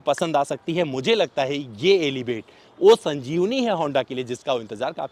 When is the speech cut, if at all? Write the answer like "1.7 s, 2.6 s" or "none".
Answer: none